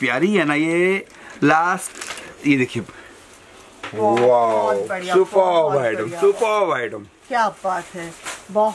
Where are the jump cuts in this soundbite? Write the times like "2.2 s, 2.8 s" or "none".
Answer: none